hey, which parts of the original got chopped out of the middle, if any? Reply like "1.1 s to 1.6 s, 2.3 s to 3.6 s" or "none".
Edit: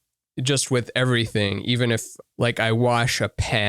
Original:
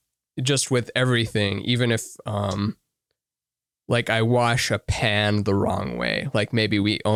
2.2 s to 3.7 s